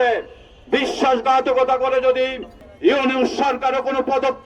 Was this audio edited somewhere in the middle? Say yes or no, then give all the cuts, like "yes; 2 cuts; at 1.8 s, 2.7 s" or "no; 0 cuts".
yes; 1 cut; at 2.7 s